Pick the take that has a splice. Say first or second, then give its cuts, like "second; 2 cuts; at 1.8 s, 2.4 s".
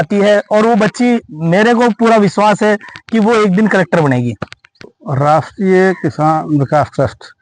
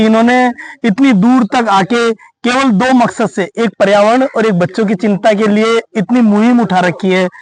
first; 1 cut; at 4.9 s